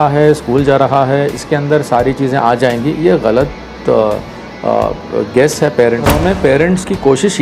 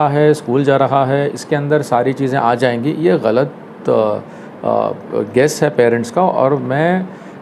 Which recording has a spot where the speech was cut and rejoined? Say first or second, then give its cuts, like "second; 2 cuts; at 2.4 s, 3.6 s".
first; 1 cut; at 6.1 s